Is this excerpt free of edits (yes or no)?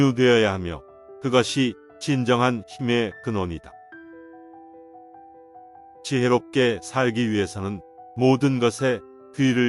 yes